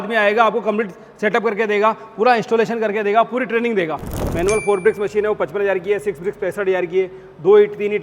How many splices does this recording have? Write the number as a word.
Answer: one